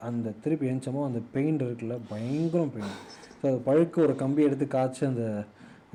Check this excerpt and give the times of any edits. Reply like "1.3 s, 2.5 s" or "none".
none